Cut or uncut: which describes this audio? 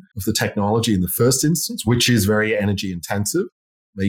uncut